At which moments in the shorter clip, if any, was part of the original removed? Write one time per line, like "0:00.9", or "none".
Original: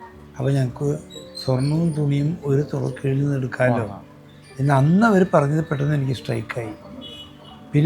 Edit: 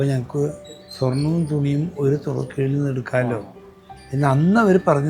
none